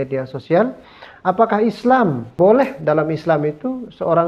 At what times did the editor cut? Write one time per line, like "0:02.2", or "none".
0:02.3

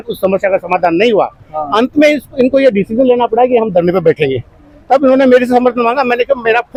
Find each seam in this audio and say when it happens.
none

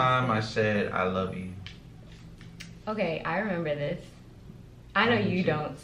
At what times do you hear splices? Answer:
none

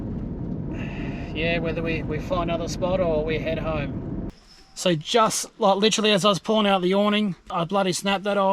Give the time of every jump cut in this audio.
0:04.3

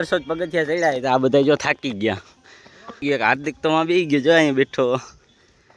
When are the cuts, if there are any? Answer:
0:03.0

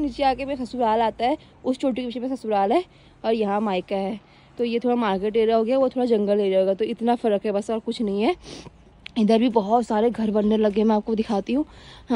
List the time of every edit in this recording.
none

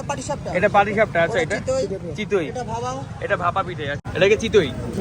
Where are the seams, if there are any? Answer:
0:04.0

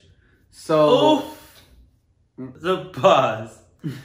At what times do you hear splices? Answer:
none

